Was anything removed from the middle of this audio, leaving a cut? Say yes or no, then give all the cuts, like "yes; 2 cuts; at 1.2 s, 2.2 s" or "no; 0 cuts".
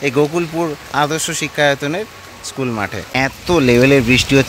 yes; 1 cut; at 3.1 s